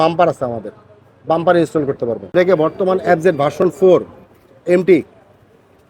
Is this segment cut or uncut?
cut